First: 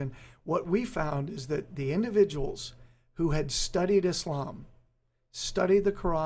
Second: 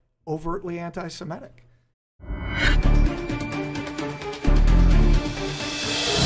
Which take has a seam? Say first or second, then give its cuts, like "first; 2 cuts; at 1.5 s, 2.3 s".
second; 1 cut; at 1.9 s